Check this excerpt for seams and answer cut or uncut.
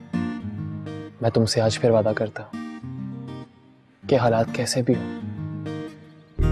uncut